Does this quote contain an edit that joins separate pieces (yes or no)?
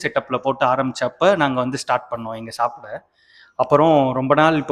no